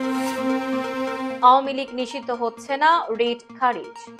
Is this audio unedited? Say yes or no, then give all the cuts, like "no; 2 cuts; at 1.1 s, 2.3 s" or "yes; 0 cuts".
yes; 0 cuts